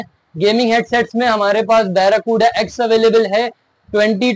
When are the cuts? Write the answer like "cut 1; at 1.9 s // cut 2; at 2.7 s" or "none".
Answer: none